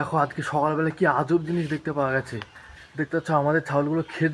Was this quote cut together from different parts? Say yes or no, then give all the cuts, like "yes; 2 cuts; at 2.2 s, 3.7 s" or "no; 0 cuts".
no; 0 cuts